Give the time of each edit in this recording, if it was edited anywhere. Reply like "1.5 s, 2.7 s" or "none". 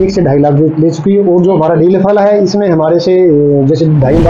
none